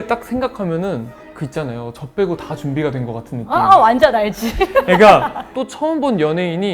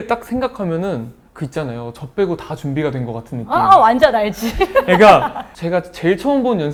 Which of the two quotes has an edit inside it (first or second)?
first